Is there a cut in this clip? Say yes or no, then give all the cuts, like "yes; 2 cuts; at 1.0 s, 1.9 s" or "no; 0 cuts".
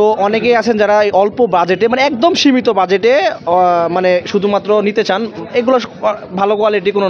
no; 0 cuts